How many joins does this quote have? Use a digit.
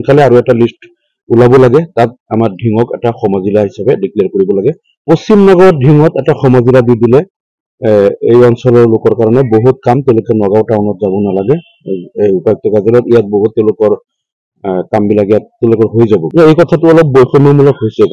2